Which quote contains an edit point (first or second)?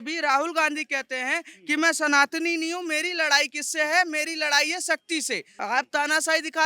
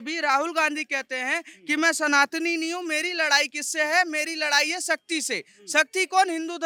first